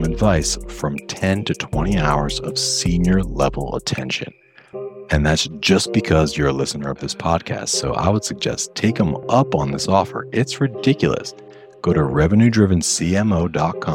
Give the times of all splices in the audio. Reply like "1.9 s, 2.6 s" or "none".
none